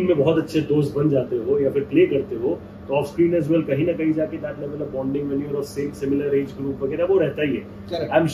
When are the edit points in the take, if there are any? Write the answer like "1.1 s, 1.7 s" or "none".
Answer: none